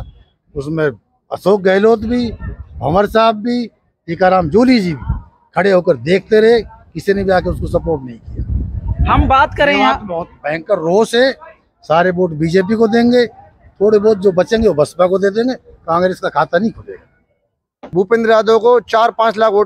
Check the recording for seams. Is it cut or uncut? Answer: cut